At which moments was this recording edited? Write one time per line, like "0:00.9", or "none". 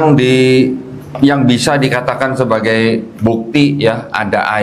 none